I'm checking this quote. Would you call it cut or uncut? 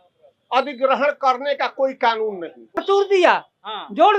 cut